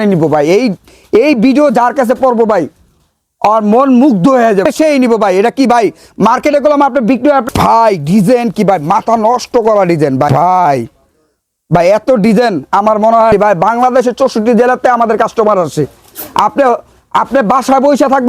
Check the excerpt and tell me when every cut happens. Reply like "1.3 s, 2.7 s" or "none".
4.6 s, 7.4 s, 10.3 s, 13.3 s